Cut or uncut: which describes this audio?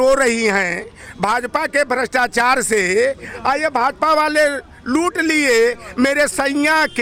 uncut